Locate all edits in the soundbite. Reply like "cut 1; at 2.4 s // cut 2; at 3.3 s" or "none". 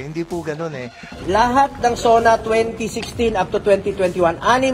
cut 1; at 1.0 s